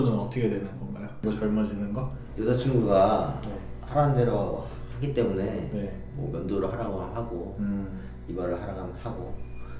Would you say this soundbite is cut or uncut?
cut